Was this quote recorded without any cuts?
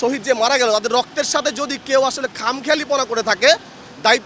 yes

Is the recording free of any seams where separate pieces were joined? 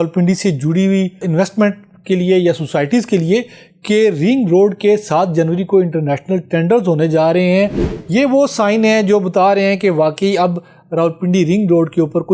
no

